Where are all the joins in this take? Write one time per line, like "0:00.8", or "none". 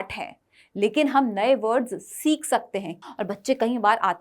0:02.9